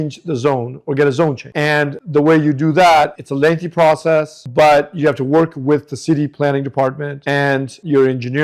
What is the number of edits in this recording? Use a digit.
0